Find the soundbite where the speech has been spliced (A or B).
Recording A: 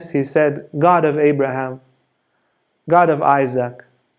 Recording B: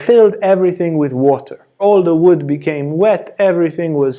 B